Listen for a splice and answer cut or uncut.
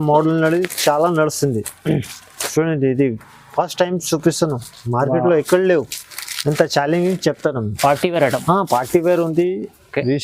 uncut